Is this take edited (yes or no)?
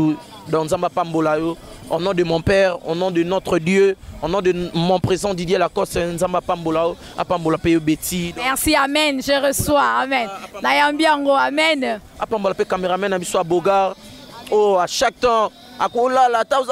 no